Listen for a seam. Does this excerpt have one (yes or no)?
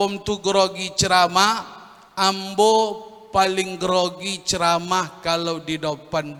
no